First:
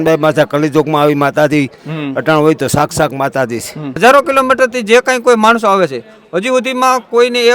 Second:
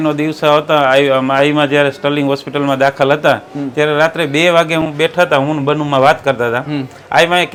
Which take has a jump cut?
first; 1 cut; at 3.9 s

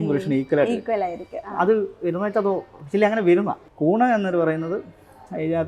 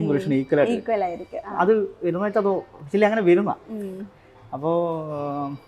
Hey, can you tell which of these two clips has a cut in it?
first; 1 cut; at 3.6 s

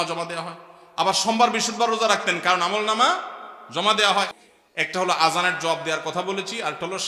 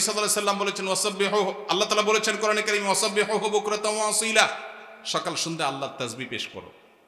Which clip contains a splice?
first; 1 cut; at 4.4 s

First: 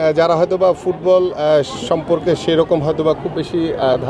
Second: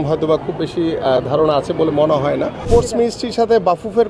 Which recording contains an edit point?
second; 1 cut; at 2.6 s

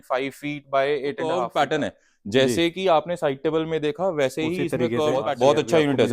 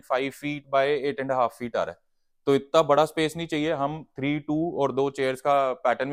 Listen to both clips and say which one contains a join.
first; 2 cuts; at 1.5 s, 5.3 s

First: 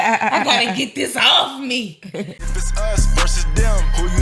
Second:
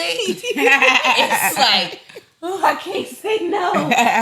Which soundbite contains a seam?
first; 1 cut; at 2.5 s

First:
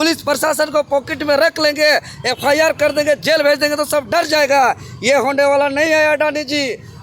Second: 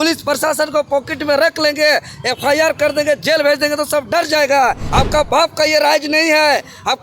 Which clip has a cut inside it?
second; 1 cut; at 4.8 s

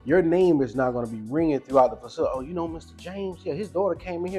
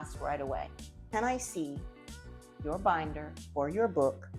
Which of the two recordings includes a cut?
second; 1 cut; at 1.0 s

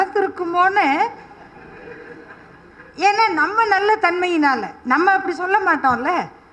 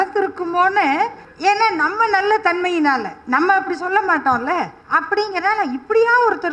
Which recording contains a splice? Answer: second; 2 cuts; at 1.2 s, 4.8 s

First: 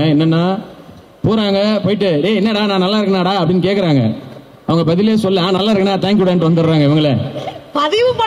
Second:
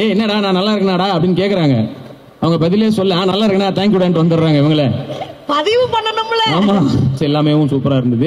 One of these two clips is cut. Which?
second; 1 cut; at 7.2 s

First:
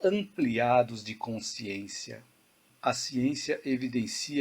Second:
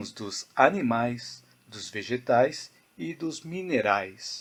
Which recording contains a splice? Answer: first; 1 cut; at 2.7 s

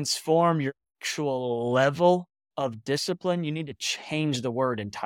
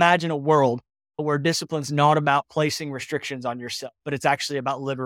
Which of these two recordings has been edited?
second; 1 cut; at 1.2 s

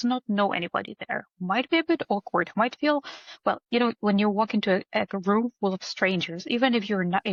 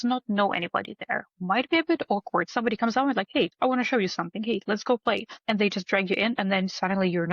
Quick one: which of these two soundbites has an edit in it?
second; 3 cuts; at 2.5 s, 3.5 s, 5.3 s

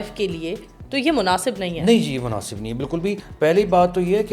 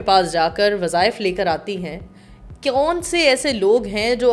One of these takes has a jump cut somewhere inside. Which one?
first; 1 cut; at 3.2 s

